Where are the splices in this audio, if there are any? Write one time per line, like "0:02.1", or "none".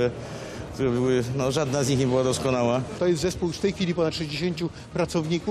0:02.9